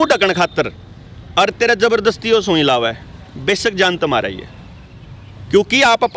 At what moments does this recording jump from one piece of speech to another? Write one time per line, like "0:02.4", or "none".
none

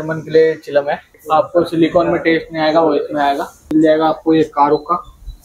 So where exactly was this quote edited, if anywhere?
0:01.2
0:03.6

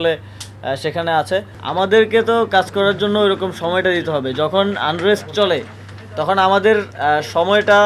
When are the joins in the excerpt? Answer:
0:01.6

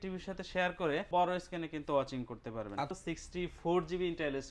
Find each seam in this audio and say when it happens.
0:01.1
0:03.0

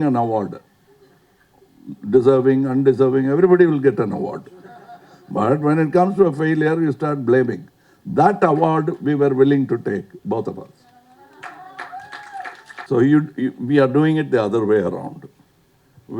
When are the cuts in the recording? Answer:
0:12.9

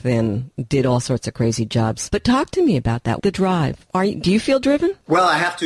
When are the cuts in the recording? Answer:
0:02.0
0:03.2

